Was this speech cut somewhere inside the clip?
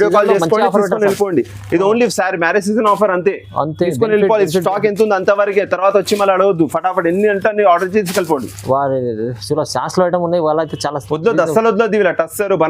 no; 0 cuts

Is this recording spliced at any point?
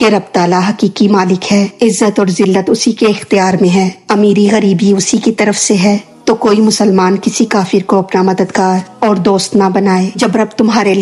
yes; 1 cut; at 10.1 s

